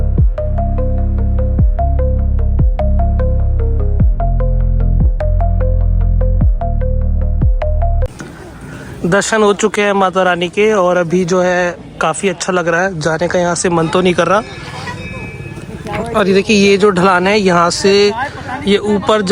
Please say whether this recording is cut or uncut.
uncut